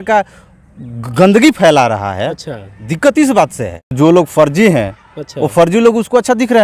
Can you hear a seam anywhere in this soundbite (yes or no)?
yes